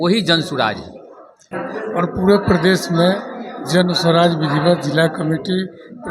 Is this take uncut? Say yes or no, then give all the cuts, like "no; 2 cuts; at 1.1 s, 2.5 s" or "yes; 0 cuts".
no; 1 cut; at 1.2 s